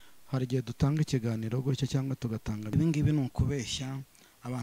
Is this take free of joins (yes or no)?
no